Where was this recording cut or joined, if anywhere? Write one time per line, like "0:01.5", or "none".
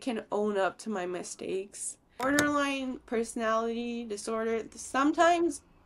0:02.1